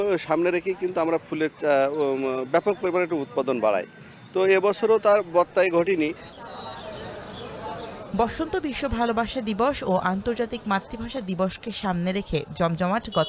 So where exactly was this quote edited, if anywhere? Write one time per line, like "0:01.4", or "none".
none